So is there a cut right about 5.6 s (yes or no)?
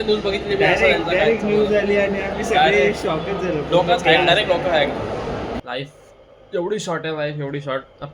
yes